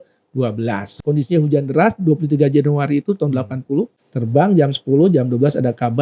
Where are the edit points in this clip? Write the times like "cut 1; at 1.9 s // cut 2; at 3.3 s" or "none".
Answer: cut 1; at 0.9 s // cut 2; at 4.1 s